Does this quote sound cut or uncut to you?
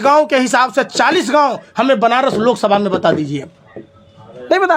uncut